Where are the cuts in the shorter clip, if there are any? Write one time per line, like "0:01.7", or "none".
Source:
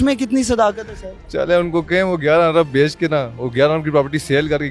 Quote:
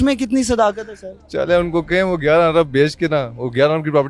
none

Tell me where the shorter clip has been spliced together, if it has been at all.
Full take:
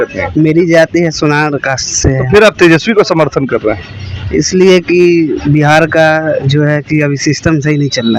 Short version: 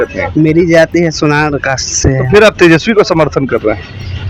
none

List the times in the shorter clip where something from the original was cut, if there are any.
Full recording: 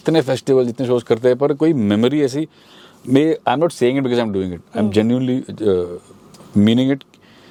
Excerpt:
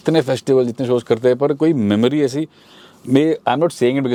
none

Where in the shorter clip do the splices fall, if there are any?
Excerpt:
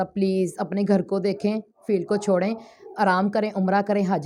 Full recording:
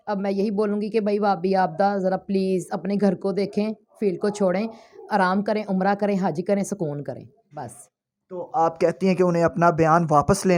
none

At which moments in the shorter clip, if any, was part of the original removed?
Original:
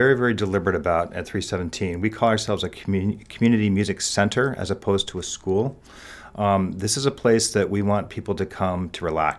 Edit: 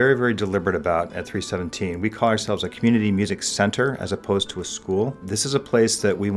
0:02.7
0:05.3

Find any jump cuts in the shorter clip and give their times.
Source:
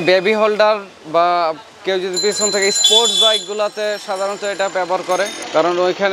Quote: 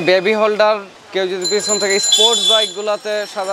0:01.0

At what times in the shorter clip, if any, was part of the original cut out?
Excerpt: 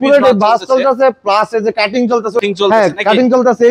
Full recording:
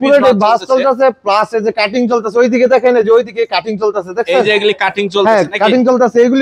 0:02.4

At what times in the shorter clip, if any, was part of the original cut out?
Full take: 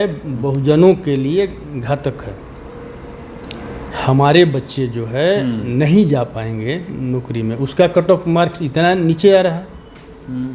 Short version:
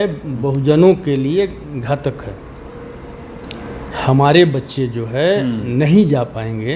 none

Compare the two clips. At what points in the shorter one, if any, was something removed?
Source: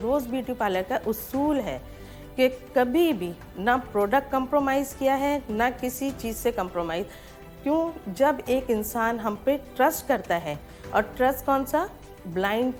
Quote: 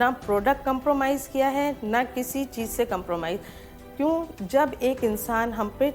none

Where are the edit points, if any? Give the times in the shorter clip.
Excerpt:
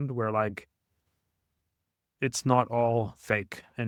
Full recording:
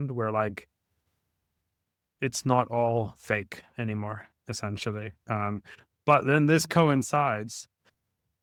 none

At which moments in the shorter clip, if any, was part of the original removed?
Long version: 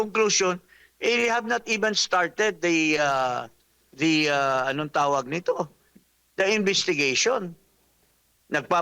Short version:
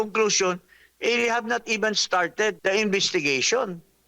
0:02.6

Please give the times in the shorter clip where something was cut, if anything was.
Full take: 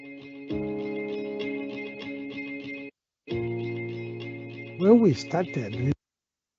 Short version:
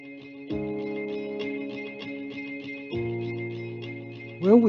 0:02.8

